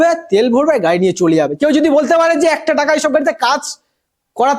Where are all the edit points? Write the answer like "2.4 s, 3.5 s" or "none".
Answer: none